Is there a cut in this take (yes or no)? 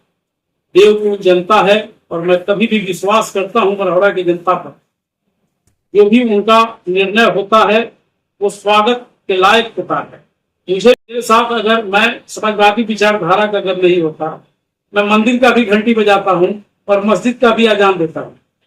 yes